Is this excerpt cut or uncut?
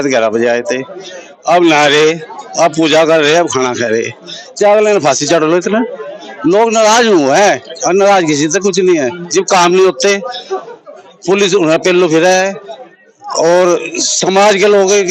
uncut